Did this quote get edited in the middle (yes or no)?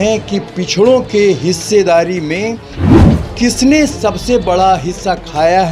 no